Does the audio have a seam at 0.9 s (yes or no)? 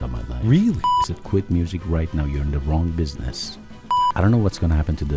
yes